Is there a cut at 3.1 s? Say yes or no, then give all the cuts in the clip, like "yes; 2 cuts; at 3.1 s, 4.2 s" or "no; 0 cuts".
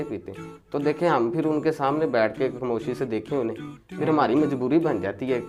no; 0 cuts